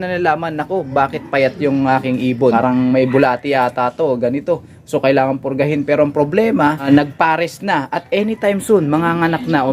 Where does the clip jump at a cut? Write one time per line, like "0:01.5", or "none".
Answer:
0:02.5
0:06.8